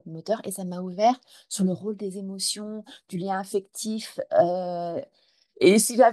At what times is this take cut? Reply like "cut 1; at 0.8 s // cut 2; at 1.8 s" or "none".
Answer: none